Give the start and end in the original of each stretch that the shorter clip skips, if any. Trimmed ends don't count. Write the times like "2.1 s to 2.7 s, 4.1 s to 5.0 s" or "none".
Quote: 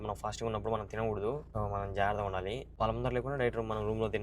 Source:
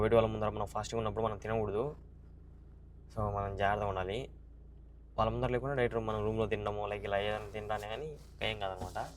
2.0 s to 3.1 s, 4.3 s to 5.0 s